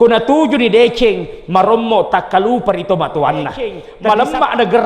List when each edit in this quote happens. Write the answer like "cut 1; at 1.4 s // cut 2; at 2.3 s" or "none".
cut 1; at 3.9 s